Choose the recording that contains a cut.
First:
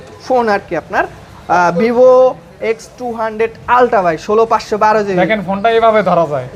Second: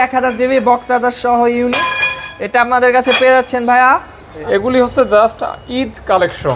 second; 1 cut; at 4.4 s

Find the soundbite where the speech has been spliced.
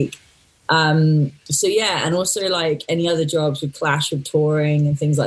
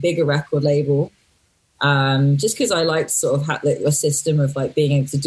first; 1 cut; at 1.4 s

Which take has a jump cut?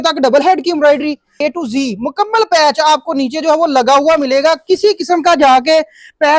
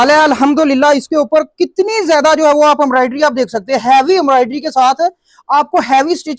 first; 1 cut; at 1.4 s

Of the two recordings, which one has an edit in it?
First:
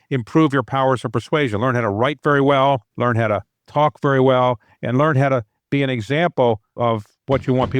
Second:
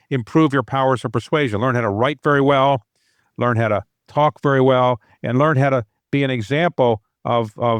first; 2 cuts; at 2.9 s, 6.7 s

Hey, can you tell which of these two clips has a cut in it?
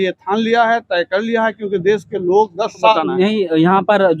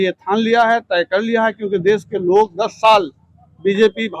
first; 1 cut; at 2.9 s

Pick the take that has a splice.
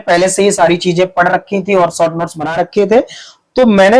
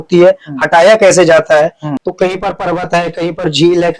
second; 1 cut; at 1.9 s

